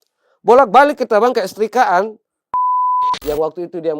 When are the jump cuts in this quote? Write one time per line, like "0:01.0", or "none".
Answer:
0:02.8